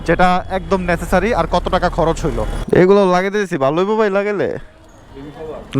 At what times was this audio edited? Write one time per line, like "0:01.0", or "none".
0:02.5